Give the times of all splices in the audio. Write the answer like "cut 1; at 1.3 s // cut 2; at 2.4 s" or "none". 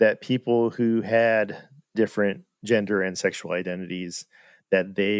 cut 1; at 1.9 s